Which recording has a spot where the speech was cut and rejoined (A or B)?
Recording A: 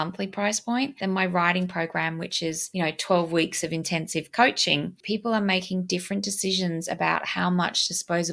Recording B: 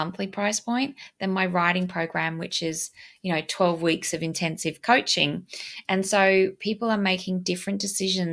A